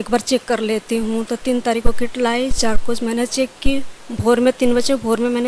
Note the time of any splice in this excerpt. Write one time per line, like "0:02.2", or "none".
none

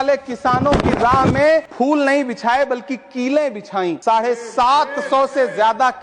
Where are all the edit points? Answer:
0:01.7
0:04.0

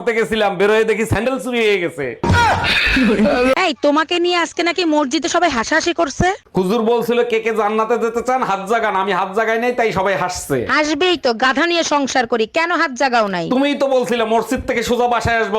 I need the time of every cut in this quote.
0:03.5

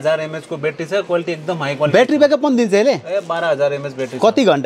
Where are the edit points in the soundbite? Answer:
none

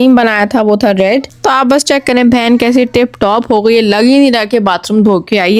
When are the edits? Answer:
0:01.3

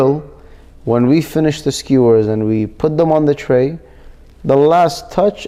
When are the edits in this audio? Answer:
none

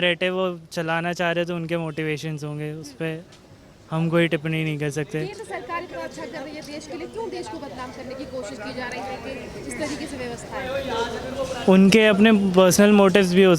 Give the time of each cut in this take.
none

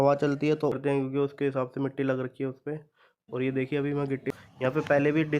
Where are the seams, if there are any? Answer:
0:00.7
0:04.2

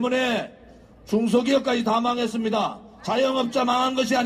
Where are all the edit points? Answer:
none

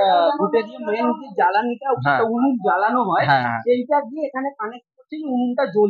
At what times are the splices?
none

